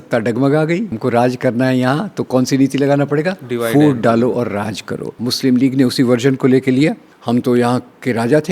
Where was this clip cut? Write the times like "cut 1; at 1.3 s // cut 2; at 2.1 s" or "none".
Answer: cut 1; at 0.9 s // cut 2; at 5.2 s // cut 3; at 7.1 s